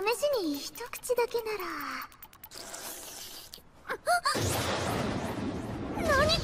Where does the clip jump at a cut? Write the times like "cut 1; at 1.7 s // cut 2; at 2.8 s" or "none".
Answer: cut 1; at 3.3 s